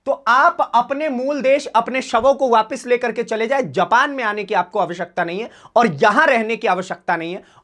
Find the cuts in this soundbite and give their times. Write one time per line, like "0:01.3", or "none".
none